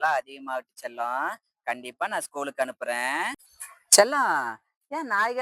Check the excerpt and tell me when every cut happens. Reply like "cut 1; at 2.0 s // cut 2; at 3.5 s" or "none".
cut 1; at 3.3 s